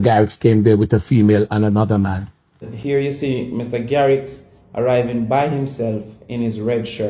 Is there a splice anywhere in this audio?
yes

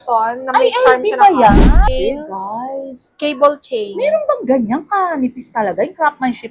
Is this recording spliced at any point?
yes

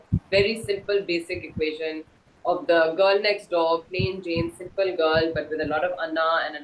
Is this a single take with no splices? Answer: yes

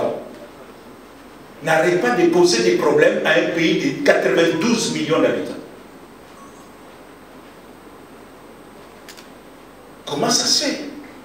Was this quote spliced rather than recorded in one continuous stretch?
no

